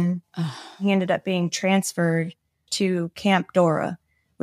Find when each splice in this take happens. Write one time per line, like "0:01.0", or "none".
0:00.8
0:02.6